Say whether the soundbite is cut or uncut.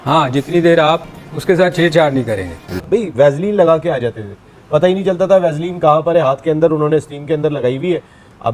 cut